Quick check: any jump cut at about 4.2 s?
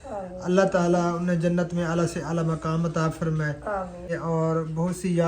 yes; 1 cut; at 4.2 s

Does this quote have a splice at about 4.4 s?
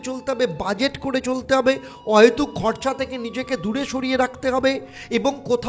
no; 0 cuts

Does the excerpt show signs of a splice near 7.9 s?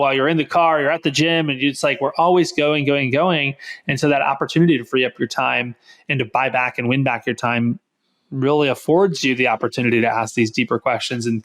no; 0 cuts

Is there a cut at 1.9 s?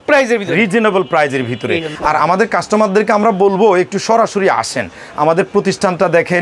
yes; 1 cut; at 1.9 s

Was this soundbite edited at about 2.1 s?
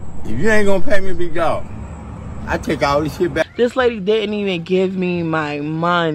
no; 0 cuts

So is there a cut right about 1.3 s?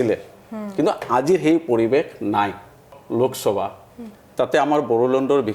no; 1 cut; at 2.9 s

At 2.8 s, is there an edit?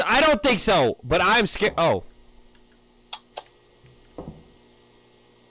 no; 0 cuts

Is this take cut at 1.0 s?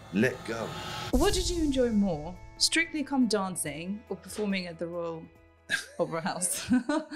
yes; 1 cut; at 1.0 s

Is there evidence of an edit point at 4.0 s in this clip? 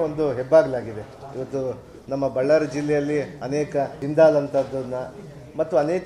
yes; 1 cut; at 4.0 s

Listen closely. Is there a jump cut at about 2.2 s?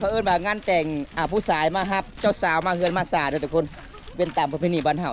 yes; 1 cut; at 2.2 s

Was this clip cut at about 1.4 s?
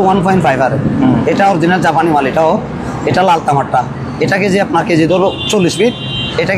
no; 0 cuts

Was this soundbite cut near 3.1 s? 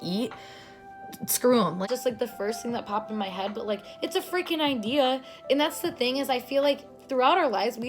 no; 1 cut; at 1.8 s

